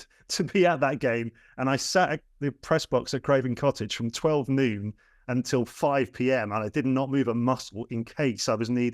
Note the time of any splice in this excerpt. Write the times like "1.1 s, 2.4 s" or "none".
none